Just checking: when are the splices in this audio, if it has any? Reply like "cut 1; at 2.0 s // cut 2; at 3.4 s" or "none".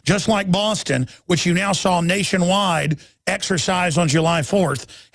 cut 1; at 3.6 s